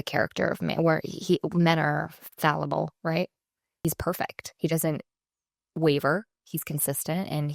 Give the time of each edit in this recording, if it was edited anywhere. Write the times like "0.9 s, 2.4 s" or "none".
3.7 s